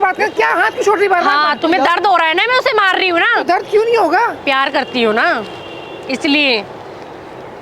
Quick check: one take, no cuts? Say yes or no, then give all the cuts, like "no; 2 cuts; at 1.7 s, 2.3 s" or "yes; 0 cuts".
yes; 0 cuts